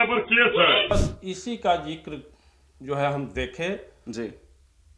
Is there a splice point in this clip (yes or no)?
yes